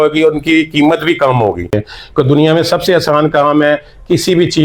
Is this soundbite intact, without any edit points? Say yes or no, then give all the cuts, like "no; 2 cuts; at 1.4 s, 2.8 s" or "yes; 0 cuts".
no; 1 cut; at 1.7 s